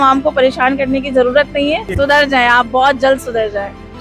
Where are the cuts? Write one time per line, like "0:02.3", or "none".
0:01.9

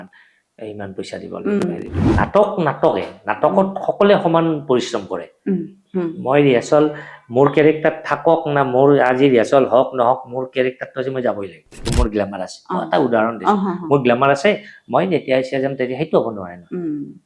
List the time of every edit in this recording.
0:02.0
0:11.9

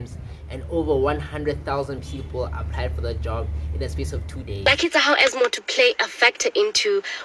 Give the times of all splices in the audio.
0:04.6

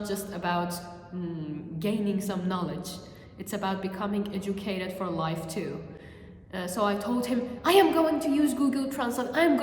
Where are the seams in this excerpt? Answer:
none

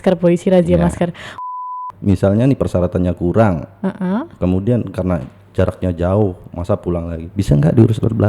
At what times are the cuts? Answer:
0:01.6

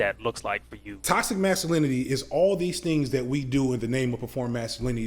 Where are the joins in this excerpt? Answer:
0:00.9

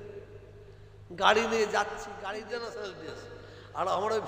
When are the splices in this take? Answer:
0:02.1

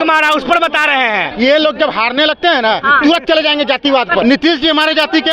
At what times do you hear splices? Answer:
0:01.3
0:04.2

